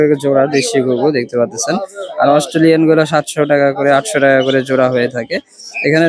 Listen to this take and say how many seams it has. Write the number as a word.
zero